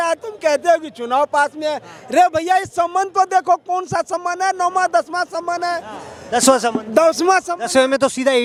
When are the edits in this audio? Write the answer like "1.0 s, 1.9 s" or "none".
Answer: none